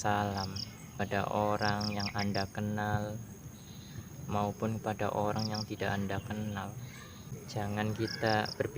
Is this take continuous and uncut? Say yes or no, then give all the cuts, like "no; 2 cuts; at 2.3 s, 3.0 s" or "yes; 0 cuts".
no; 2 cuts; at 1.0 s, 7.4 s